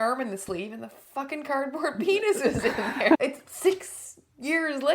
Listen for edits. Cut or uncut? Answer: cut